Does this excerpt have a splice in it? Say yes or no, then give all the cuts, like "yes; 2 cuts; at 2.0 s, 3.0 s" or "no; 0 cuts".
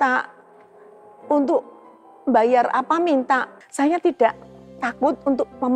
yes; 1 cut; at 3.6 s